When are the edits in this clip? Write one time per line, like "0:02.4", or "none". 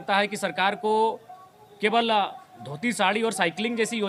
none